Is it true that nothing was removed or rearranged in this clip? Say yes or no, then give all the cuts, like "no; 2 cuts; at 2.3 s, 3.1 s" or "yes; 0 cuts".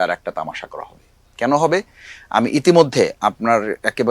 yes; 0 cuts